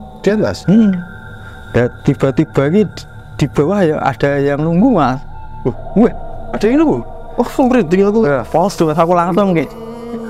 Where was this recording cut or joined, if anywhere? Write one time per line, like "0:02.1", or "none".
none